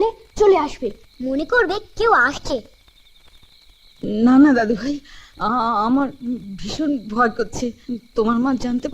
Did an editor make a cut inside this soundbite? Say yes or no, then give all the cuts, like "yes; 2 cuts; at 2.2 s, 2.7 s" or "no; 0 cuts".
no; 0 cuts